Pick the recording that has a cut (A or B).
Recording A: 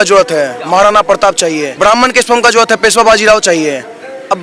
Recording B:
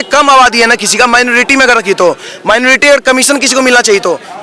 A